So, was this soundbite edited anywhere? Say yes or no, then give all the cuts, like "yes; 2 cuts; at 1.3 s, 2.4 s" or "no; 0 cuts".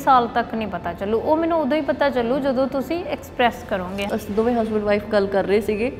yes; 1 cut; at 4.1 s